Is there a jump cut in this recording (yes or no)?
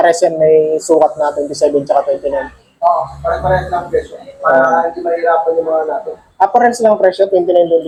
no